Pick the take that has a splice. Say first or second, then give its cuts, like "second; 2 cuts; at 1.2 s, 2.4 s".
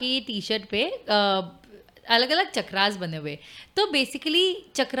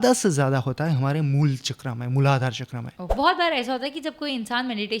second; 1 cut; at 3.0 s